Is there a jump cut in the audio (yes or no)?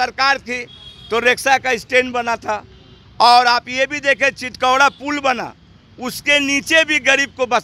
no